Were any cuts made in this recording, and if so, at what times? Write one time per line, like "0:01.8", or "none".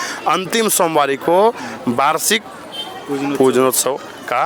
none